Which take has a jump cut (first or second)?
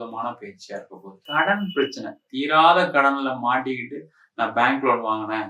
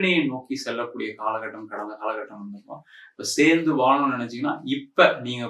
first